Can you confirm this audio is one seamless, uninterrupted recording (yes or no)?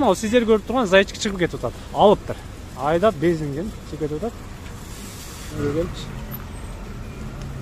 no